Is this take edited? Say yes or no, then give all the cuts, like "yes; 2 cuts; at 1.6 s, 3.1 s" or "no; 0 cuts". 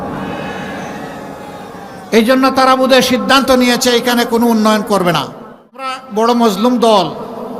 yes; 1 cut; at 6.0 s